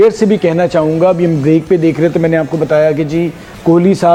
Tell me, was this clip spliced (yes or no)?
no